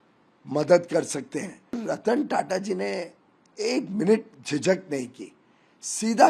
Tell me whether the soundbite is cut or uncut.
cut